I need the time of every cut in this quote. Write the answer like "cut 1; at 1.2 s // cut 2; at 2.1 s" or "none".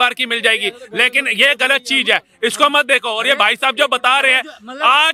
none